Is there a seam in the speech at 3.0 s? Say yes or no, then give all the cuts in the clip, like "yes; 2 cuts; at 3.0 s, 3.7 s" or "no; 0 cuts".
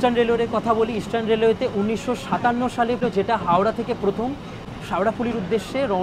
yes; 1 cut; at 3.0 s